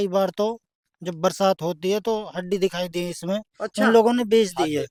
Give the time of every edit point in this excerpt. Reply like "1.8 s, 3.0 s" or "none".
none